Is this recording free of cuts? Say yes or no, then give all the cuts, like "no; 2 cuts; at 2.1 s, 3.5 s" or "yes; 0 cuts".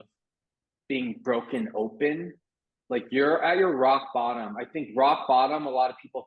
yes; 0 cuts